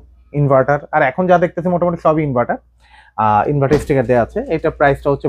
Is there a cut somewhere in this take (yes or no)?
no